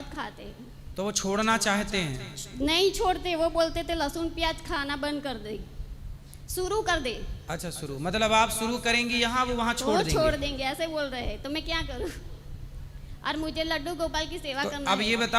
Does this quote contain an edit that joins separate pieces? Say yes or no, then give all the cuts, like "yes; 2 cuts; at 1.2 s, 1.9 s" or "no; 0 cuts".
no; 0 cuts